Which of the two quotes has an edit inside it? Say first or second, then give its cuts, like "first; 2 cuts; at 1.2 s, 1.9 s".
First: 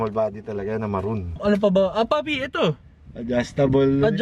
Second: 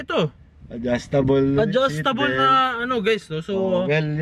first; 1 cut; at 1.3 s